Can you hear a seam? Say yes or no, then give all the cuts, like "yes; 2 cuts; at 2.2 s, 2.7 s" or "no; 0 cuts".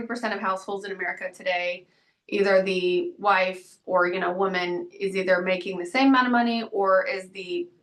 no; 0 cuts